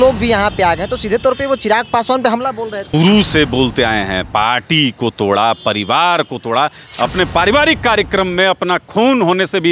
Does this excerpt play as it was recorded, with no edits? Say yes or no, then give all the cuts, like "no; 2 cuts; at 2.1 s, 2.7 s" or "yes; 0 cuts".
no; 2 cuts; at 2.9 s, 6.8 s